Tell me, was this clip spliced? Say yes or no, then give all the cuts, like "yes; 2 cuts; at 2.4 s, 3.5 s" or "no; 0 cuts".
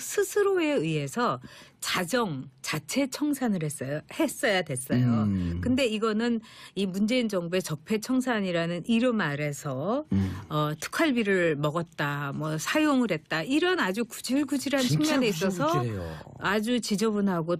no; 0 cuts